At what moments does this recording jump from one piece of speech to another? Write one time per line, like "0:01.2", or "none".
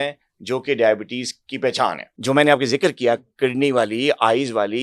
0:02.1